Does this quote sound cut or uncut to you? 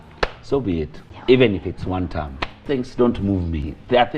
cut